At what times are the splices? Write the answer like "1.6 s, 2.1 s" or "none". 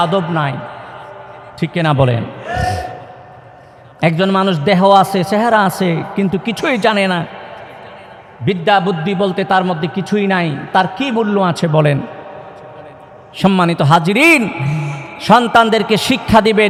none